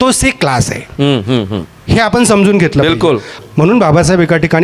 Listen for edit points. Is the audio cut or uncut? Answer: cut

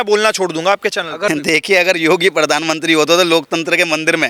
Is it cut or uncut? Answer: cut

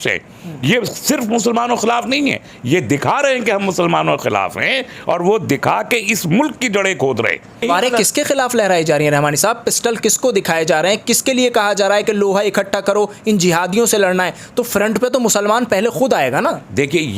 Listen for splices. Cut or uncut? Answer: cut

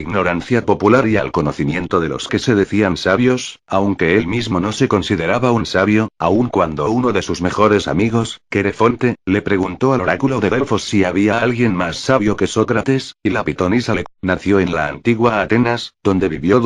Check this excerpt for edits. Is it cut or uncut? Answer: uncut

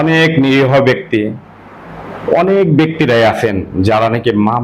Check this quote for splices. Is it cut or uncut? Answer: uncut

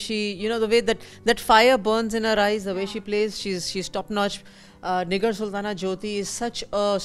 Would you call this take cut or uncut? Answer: uncut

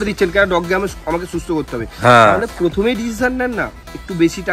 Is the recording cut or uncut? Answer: uncut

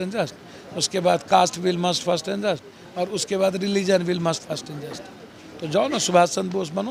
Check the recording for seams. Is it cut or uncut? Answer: uncut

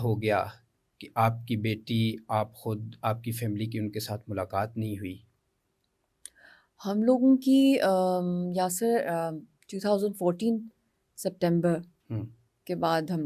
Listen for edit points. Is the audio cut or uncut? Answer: uncut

